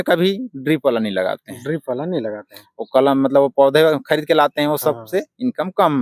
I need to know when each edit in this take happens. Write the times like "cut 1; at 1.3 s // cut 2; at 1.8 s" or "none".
none